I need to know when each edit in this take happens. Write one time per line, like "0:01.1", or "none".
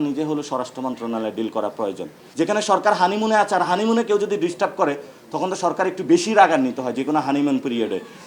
0:02.2